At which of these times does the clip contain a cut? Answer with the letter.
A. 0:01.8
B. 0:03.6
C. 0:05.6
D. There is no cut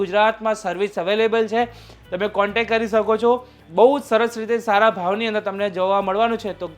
B